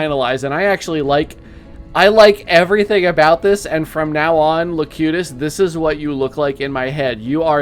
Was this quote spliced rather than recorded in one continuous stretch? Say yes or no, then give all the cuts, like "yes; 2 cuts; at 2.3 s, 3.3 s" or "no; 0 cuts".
no; 0 cuts